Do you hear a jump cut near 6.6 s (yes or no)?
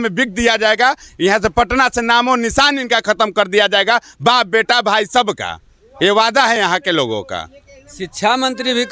no